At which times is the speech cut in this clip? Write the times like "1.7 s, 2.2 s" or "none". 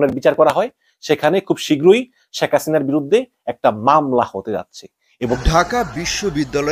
5.4 s